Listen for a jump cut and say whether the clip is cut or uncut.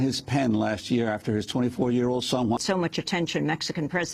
uncut